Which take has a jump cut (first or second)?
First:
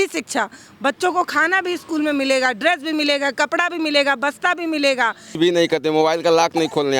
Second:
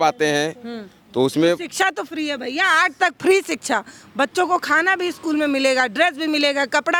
first